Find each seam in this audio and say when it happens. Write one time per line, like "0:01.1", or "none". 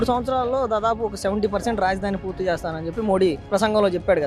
none